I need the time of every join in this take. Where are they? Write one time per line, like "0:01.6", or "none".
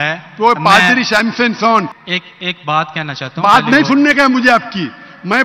0:02.0